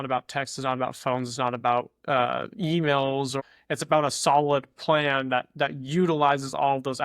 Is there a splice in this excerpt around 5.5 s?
no; 1 cut; at 3.4 s

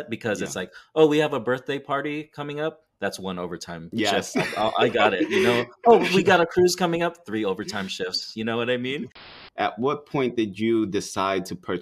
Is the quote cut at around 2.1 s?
no; 2 cuts; at 3.9 s, 9.3 s

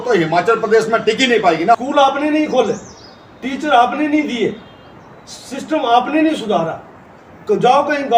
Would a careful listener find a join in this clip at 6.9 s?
no; 1 cut; at 1.8 s

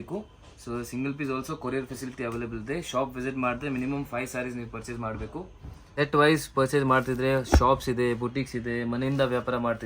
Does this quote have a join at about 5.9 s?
yes; 1 cut; at 5.9 s

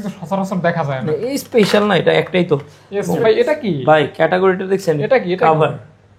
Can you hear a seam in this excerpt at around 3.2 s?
yes; 1 cut; at 3.2 s

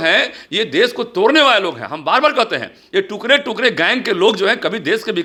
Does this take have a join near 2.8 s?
no; 0 cuts

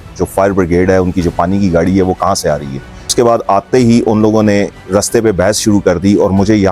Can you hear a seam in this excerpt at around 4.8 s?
no; 1 cut; at 3.1 s

